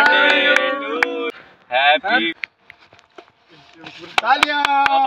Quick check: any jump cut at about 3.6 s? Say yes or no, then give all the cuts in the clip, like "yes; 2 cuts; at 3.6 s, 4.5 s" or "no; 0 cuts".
no; 2 cuts; at 1.3 s, 2.3 s